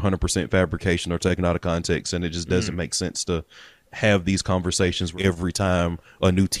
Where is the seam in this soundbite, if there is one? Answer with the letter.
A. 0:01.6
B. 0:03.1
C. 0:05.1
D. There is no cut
C